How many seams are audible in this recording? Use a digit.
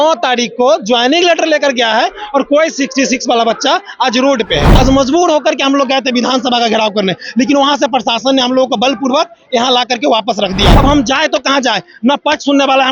2